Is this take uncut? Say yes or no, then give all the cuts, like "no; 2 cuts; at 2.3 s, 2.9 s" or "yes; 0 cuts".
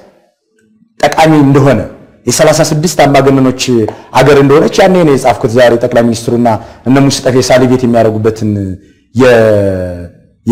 yes; 0 cuts